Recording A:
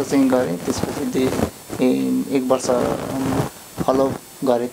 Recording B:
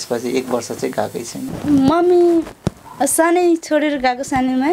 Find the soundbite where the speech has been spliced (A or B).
B